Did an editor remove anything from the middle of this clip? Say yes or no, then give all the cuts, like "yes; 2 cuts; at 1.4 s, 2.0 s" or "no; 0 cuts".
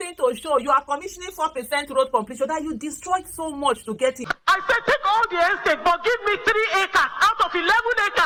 no; 0 cuts